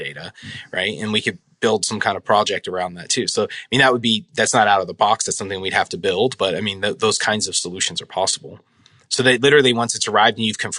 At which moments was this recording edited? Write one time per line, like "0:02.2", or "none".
none